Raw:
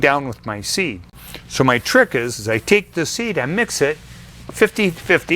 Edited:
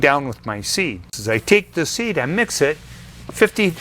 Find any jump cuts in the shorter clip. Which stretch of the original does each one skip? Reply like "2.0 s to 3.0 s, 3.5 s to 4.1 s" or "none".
1.2 s to 2.3 s